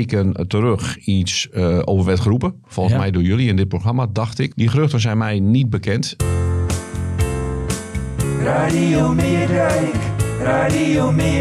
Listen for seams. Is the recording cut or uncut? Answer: cut